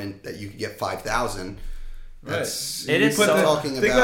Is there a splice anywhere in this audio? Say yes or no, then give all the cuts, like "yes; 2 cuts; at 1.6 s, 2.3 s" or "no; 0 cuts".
no; 0 cuts